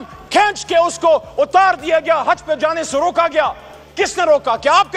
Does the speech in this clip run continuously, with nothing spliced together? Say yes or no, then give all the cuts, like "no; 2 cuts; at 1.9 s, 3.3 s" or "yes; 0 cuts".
yes; 0 cuts